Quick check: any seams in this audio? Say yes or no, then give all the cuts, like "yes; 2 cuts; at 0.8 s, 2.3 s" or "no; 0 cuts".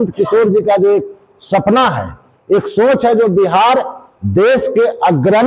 no; 0 cuts